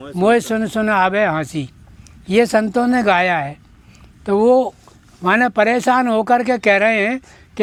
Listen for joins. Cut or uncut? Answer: uncut